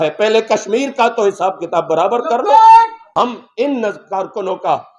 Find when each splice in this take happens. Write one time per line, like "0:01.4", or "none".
0:03.0